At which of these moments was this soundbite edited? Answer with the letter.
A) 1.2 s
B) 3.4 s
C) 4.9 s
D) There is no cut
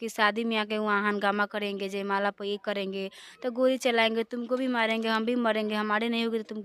D